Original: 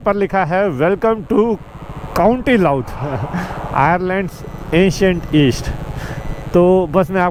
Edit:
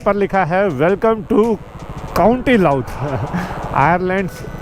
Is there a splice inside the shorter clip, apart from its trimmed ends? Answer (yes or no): no